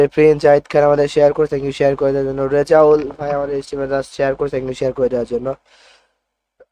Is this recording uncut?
yes; 0 cuts

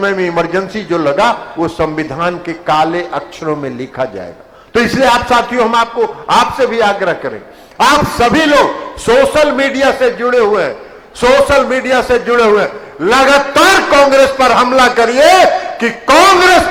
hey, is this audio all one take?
yes; 0 cuts

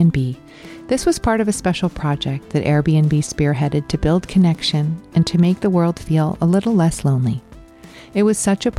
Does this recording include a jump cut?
no; 0 cuts

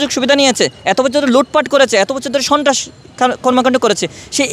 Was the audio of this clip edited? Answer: no; 0 cuts

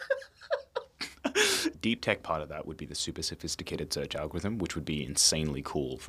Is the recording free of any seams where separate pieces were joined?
no; 1 cut; at 1.8 s

